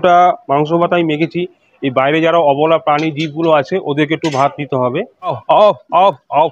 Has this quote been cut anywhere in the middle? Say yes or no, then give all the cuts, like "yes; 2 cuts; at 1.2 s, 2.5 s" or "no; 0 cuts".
yes; 1 cut; at 5.4 s